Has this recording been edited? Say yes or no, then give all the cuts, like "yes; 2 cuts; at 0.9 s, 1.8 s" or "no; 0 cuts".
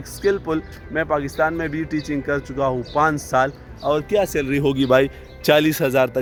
no; 0 cuts